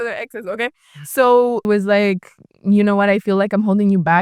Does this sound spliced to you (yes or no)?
yes